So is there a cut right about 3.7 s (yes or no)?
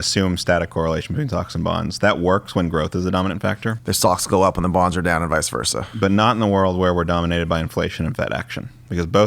yes